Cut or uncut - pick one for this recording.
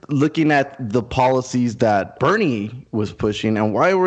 cut